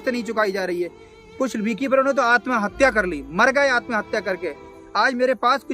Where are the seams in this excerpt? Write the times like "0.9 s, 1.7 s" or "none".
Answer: 1.1 s, 4.7 s